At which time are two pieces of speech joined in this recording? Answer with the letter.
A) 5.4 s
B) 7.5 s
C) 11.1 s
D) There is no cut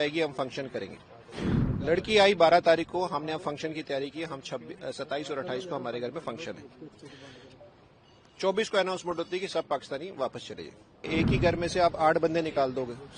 C